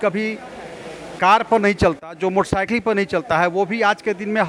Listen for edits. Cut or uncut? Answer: uncut